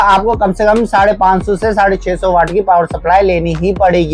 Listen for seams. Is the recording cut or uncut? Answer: uncut